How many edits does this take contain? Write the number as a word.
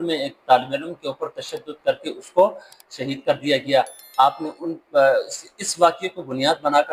zero